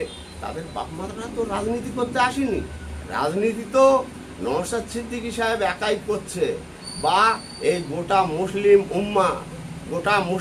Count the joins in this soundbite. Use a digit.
0